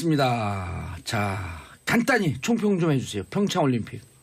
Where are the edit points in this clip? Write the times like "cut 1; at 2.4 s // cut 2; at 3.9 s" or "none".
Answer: cut 1; at 3.1 s